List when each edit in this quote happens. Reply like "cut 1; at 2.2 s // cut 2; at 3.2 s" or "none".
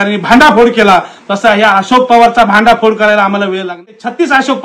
cut 1; at 3.7 s

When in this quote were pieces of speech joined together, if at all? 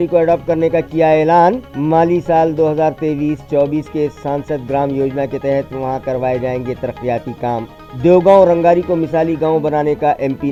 none

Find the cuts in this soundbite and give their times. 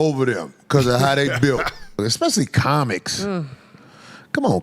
cut 1; at 2.0 s

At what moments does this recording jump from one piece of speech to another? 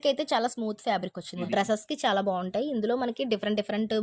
cut 1; at 1.4 s

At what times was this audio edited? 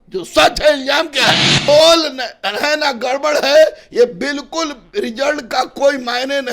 cut 1; at 1.7 s

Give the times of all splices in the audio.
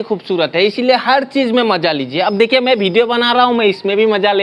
none

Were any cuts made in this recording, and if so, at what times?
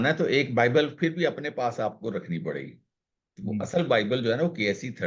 none

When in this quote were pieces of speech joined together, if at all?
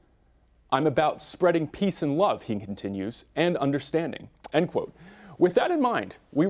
cut 1; at 4.2 s

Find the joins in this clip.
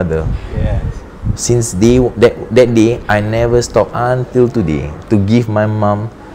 none

